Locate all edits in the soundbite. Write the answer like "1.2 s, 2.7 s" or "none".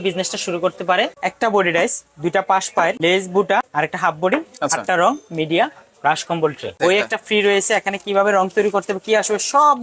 1.2 s, 3.0 s, 3.7 s, 6.8 s